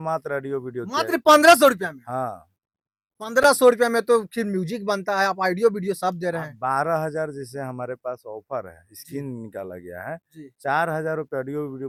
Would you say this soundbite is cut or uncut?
uncut